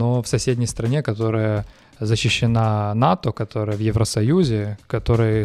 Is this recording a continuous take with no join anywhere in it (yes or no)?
yes